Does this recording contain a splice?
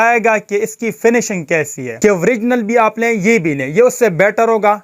yes; 1 cut; at 1.8 s

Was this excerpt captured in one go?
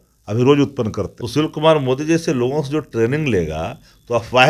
no; 1 cut; at 1.1 s

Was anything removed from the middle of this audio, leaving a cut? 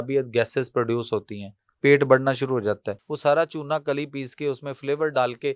yes; 1 cut; at 3.0 s

